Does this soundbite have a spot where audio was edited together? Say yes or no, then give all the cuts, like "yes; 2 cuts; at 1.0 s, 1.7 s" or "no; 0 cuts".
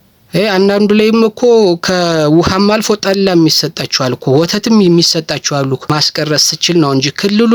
yes; 1 cut; at 5.9 s